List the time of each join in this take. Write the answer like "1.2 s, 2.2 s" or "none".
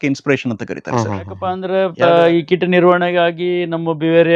1.6 s